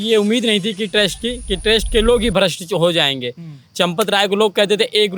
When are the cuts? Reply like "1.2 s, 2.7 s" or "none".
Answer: none